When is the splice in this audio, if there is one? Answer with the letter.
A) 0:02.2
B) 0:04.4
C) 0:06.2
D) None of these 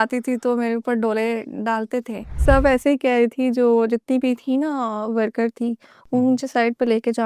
A